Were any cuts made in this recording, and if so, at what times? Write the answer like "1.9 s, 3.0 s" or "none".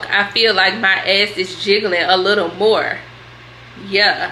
none